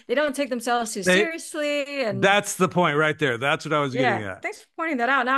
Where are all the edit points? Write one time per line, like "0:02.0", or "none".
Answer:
0:04.4